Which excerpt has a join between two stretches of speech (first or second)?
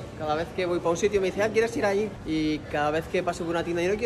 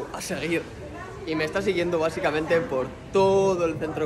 first